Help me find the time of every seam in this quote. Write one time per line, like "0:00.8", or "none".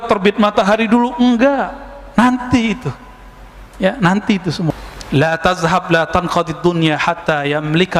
0:04.7

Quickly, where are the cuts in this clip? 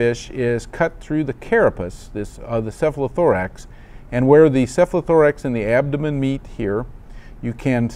0:04.8

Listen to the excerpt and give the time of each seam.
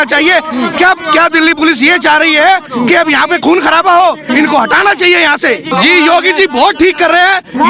0:05.7

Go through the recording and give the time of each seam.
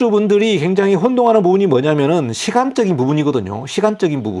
none

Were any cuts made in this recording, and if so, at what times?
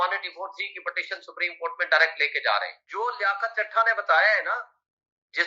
0:02.8

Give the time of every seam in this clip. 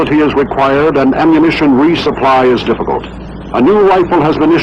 0:01.2

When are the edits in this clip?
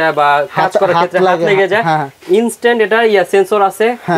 none

